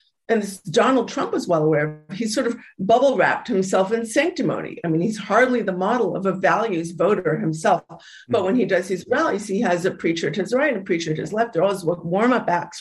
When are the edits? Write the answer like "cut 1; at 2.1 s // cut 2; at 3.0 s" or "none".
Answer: none